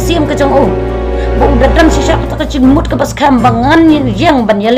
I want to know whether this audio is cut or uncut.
uncut